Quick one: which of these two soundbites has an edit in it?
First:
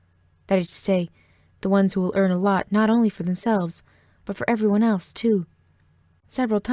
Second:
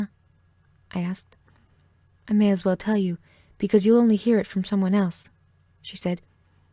second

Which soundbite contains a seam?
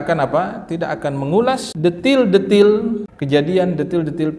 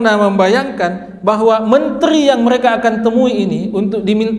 first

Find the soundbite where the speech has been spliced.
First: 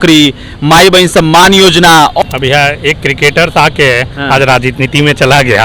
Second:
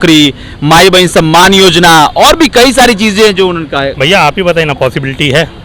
first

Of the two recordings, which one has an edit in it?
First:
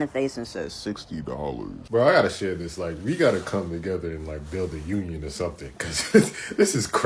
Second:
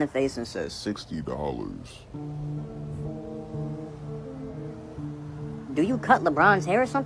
first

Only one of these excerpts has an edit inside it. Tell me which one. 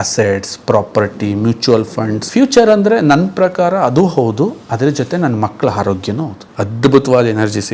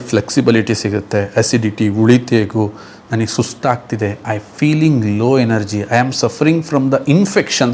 first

